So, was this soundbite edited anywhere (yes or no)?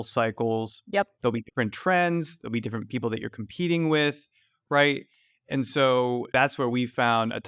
yes